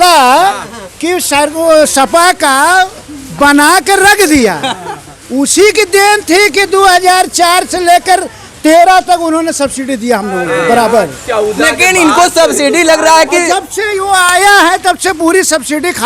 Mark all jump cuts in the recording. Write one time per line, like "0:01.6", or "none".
none